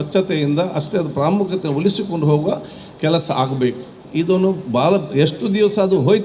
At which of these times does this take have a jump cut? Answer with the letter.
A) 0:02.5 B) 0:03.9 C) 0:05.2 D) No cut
D